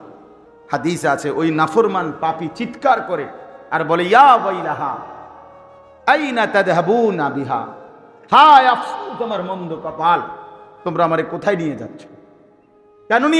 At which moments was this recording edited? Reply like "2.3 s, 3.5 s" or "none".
none